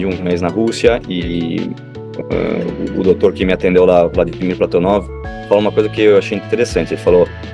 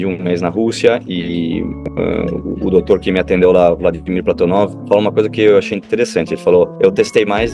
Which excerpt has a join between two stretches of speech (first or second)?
second